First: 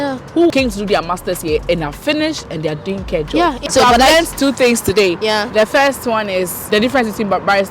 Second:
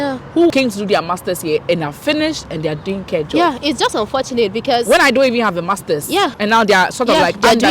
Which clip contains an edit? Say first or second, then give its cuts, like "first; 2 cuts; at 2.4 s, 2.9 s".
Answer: first; 1 cut; at 3.6 s